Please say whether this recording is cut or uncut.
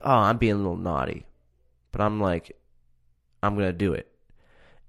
uncut